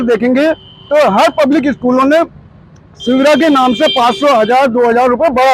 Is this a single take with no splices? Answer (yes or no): yes